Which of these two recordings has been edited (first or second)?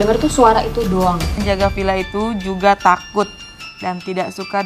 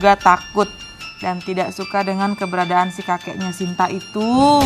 first